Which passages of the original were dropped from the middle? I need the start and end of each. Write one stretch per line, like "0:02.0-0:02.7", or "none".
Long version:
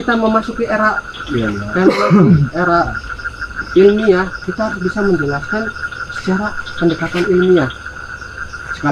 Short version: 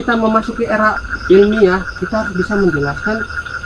0:01.1-0:03.5